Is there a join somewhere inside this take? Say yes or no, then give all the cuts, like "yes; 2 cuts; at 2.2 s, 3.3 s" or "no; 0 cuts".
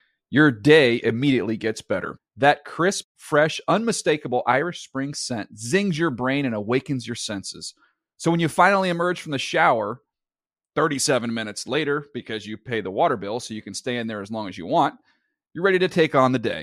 no; 0 cuts